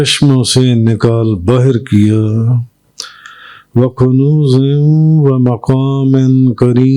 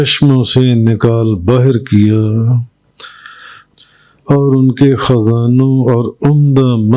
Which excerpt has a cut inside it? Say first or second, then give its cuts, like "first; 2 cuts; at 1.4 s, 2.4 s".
second; 1 cut; at 3.6 s